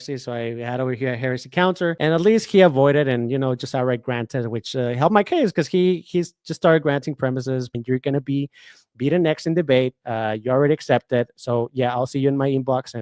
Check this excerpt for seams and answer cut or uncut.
cut